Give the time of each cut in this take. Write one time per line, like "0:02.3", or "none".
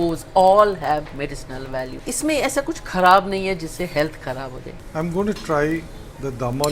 0:02.0
0:04.8